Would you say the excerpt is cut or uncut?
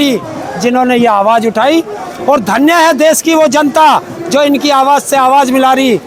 uncut